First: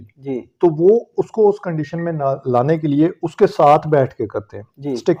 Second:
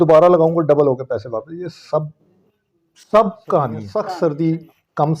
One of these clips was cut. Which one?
second; 1 cut; at 3.9 s

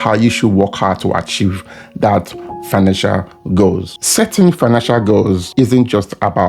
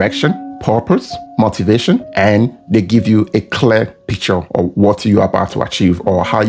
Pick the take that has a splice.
first; 2 cuts; at 3.9 s, 5.4 s

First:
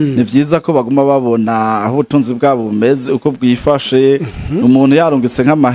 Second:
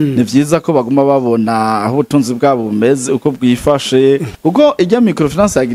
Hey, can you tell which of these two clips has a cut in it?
second; 1 cut; at 4.3 s

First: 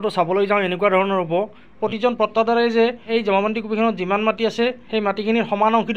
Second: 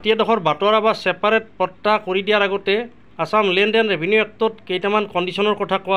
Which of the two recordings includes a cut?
first; 3 cuts; at 1.8 s, 3.1 s, 4.8 s

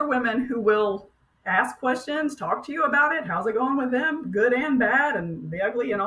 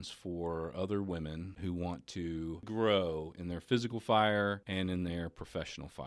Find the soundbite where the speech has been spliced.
second; 3 cuts; at 1.5 s, 2.7 s, 4.6 s

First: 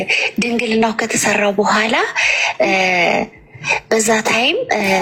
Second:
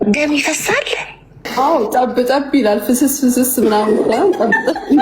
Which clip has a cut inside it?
second; 1 cut; at 1.5 s

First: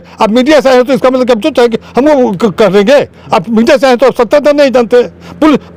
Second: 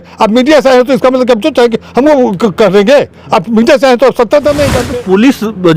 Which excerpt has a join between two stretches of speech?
second; 1 cut; at 4.8 s

